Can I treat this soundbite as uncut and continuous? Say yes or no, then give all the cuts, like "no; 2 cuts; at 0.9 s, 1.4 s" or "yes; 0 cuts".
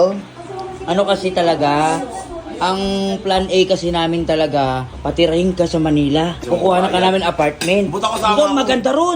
no; 2 cuts; at 4.9 s, 6.3 s